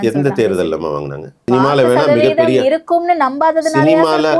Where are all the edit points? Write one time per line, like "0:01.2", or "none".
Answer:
0:01.4